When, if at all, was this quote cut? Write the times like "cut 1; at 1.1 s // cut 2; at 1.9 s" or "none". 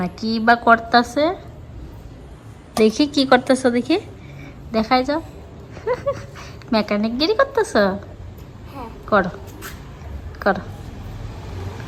none